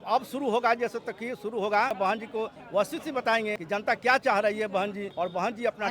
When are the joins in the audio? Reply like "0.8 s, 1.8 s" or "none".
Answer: 1.9 s, 3.6 s, 5.1 s